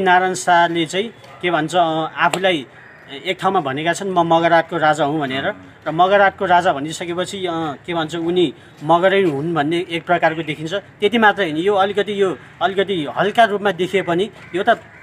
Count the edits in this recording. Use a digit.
0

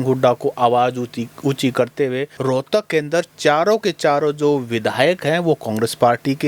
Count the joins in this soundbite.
1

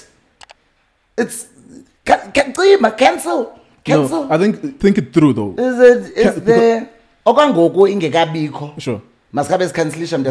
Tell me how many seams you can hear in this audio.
1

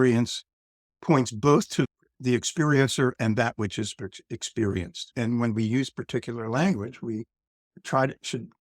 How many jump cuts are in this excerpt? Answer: 2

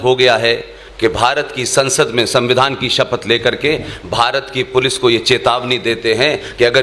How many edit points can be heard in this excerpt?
0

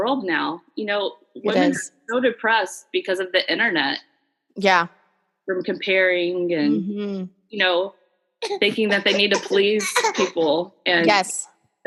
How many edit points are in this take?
0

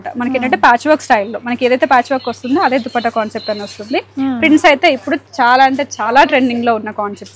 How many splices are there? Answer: 0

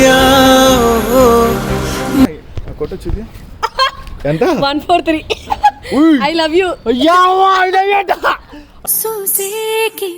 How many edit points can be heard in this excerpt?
1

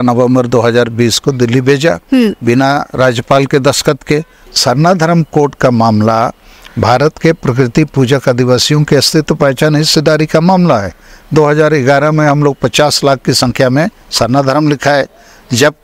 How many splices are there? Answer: 1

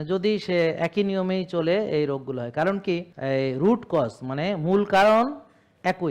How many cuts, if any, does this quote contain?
1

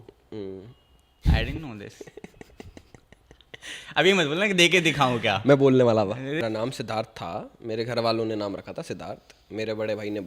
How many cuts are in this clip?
1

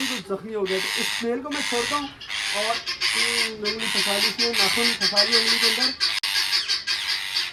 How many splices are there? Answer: 0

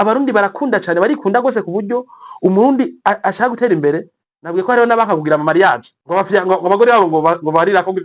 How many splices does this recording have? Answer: 1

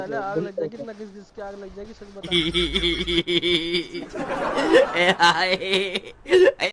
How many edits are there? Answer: 1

